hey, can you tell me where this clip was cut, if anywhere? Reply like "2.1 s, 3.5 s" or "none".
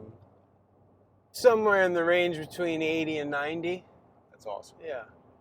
1.4 s